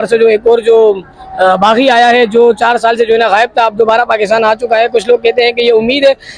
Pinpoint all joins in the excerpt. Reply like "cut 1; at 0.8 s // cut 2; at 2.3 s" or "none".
none